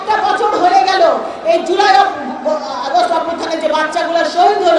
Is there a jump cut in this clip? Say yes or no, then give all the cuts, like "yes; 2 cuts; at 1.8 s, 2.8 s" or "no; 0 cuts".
no; 0 cuts